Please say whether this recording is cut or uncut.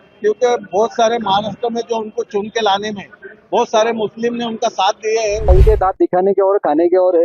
cut